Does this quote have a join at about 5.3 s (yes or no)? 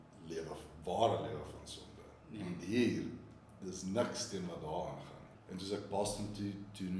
yes